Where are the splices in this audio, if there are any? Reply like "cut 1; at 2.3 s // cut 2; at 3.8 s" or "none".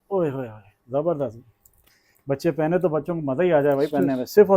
none